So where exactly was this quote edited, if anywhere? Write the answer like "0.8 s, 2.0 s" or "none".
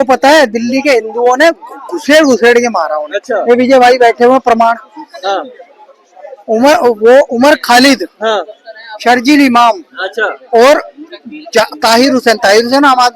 none